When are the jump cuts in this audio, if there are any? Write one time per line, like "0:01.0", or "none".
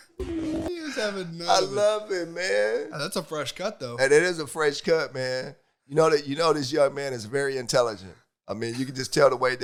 none